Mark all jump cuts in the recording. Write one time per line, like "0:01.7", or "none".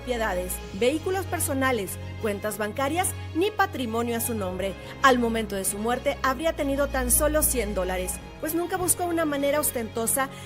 none

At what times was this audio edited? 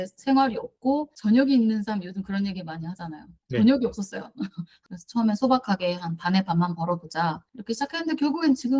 none

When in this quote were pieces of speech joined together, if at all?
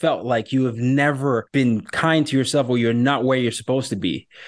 0:01.5

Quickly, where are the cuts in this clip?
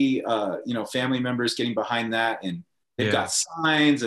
0:02.9

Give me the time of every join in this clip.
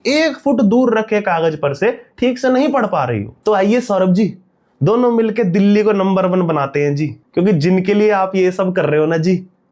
0:03.3
0:07.2

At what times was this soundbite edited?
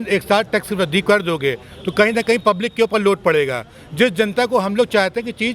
none

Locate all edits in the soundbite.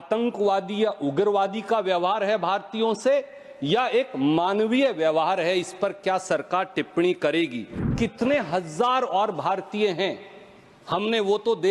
0:07.9

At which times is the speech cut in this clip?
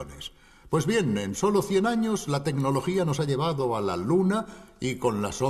0:03.3

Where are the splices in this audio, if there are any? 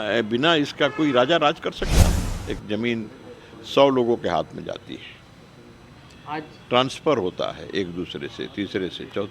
0:02.2

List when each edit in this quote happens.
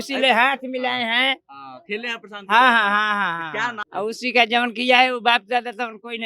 0:03.8

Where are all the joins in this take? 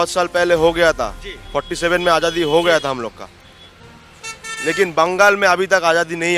none

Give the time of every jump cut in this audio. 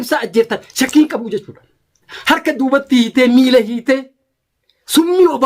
0:02.1

